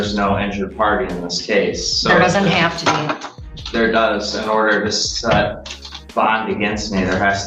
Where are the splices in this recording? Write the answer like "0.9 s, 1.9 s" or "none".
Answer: none